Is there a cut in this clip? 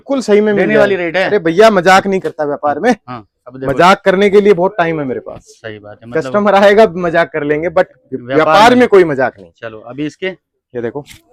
no; 0 cuts

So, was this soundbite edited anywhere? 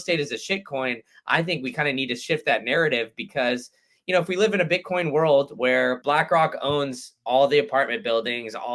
no; 0 cuts

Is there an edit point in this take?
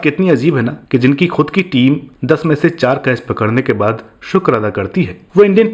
no; 0 cuts

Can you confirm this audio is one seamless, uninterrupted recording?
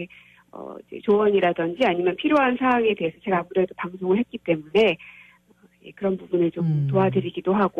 yes; 0 cuts

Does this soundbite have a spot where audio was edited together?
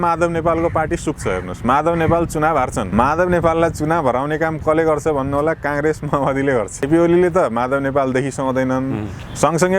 yes; 2 cuts; at 2.9 s, 6.9 s

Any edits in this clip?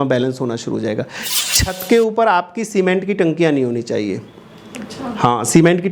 yes; 1 cut; at 1.2 s

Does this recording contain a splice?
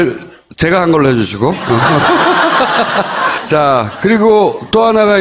yes; 1 cut; at 2.9 s

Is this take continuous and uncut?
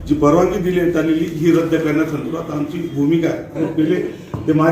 no; 1 cut; at 3.6 s

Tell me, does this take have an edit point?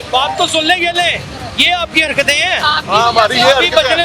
no; 0 cuts

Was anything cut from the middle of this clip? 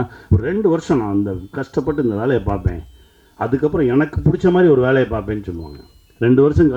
no; 0 cuts

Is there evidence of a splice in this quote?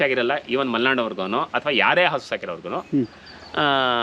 no; 0 cuts

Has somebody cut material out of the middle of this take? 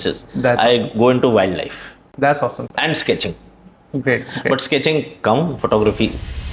no; 0 cuts

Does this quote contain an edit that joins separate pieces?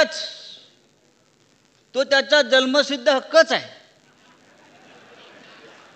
no; 0 cuts

